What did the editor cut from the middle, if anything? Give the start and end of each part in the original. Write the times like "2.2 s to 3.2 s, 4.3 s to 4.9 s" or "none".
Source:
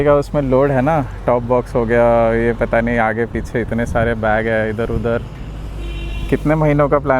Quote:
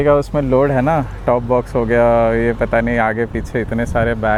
none